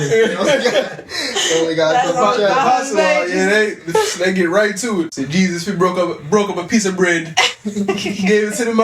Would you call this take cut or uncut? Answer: cut